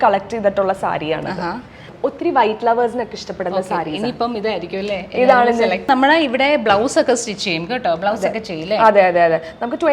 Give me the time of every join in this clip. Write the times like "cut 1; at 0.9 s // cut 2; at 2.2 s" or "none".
cut 1; at 1.9 s // cut 2; at 5.9 s